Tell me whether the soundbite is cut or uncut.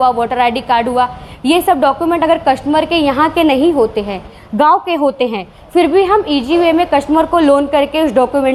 uncut